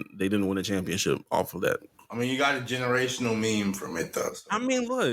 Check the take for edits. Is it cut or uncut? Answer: cut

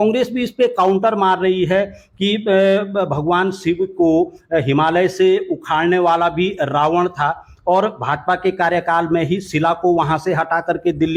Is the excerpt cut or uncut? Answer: uncut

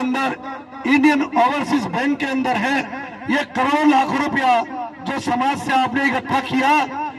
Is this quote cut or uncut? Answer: uncut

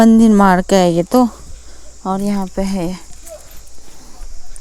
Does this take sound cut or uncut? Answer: uncut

